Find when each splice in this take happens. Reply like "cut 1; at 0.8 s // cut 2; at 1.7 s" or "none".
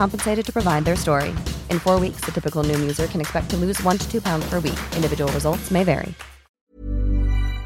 cut 1; at 6.5 s